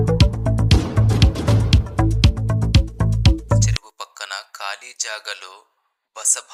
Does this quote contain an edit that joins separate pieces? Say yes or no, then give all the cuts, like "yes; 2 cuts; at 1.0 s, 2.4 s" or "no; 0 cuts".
no; 0 cuts